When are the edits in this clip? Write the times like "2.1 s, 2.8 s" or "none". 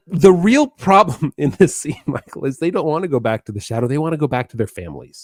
none